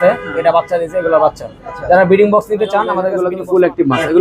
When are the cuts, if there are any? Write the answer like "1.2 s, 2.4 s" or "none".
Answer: 3.1 s